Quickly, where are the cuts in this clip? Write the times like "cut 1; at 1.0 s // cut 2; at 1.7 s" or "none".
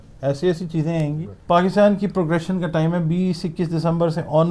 cut 1; at 1.3 s